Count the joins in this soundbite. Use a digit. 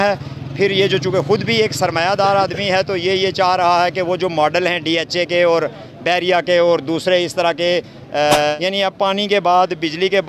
1